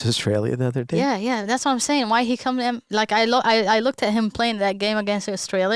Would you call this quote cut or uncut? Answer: uncut